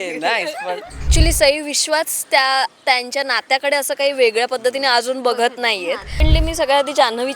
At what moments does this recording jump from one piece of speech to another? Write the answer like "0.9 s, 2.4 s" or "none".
1.0 s, 6.2 s